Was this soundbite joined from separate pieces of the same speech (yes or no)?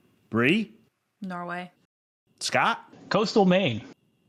no